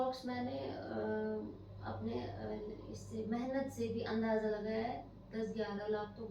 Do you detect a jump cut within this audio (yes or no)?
no